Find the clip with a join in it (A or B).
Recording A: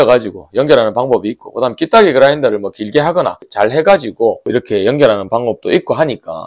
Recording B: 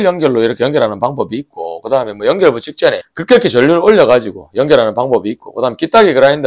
A